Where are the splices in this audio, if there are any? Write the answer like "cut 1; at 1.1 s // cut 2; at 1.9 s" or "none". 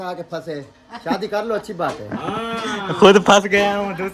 none